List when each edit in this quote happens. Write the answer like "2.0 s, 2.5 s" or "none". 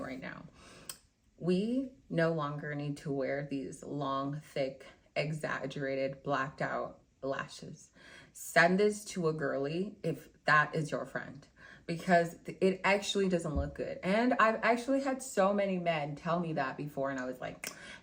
none